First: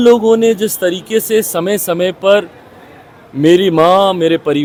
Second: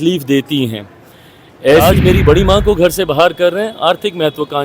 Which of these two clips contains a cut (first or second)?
second